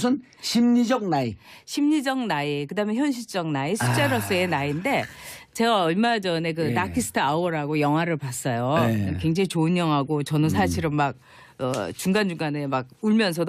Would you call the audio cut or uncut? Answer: cut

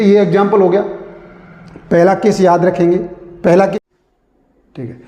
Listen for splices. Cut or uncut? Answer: cut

